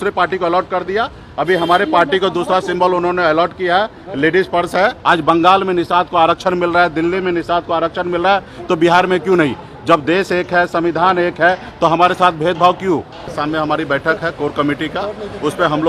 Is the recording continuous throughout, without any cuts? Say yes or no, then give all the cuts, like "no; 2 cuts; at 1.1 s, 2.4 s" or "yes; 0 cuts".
no; 2 cuts; at 5.0 s, 13.3 s